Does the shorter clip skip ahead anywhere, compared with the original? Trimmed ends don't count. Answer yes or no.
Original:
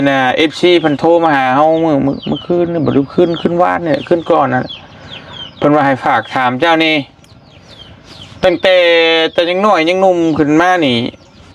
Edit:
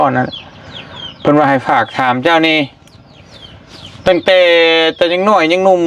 no